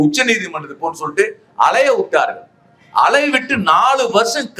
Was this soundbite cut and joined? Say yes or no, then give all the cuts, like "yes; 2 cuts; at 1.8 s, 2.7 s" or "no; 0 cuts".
no; 0 cuts